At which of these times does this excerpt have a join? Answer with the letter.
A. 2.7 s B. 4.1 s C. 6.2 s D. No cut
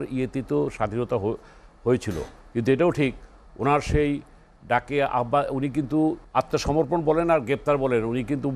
C